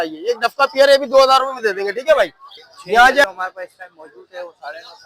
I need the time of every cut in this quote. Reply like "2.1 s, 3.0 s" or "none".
3.2 s